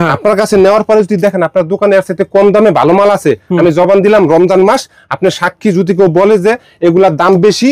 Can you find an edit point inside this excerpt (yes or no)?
no